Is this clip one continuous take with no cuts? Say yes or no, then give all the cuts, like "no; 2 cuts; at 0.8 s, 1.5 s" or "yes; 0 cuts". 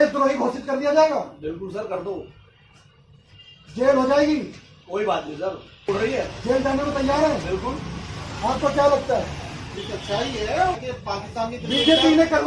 no; 2 cuts; at 5.9 s, 10.8 s